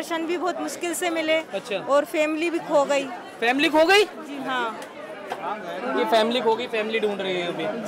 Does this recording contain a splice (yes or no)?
no